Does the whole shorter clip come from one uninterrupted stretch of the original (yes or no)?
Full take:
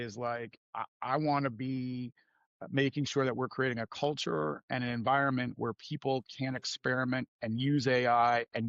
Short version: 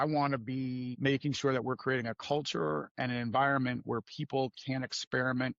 no